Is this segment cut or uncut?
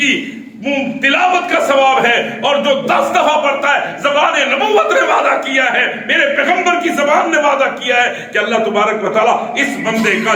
uncut